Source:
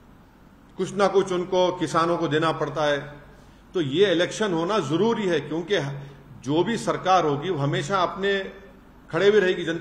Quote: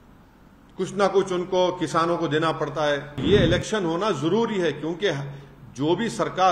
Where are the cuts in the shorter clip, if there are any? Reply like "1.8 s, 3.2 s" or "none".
3.2 s